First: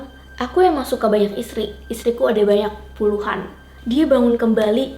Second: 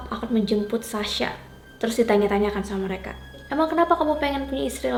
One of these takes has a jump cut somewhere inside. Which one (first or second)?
first